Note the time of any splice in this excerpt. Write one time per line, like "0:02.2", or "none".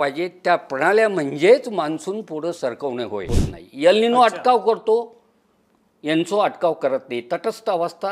0:03.4